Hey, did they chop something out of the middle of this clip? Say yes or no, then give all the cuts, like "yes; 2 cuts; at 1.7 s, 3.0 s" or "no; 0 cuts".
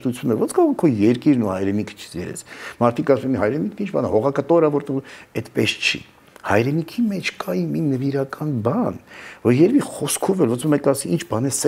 no; 0 cuts